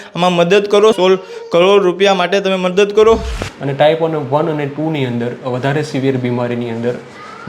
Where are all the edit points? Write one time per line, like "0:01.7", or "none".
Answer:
0:01.0
0:03.3